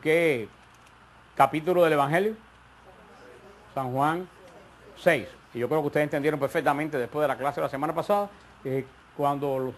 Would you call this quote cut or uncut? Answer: uncut